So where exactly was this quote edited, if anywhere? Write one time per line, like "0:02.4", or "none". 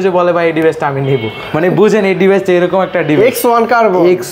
none